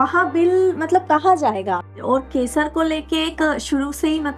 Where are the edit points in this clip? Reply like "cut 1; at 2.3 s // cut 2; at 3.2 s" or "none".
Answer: cut 1; at 1.9 s